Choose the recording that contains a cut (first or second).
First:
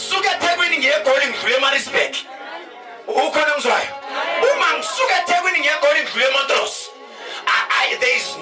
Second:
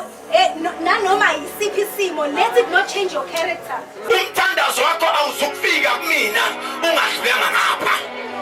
second